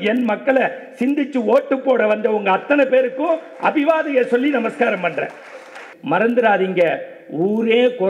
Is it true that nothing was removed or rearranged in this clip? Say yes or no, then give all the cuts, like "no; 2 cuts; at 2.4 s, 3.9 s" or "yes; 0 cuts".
no; 1 cut; at 5.9 s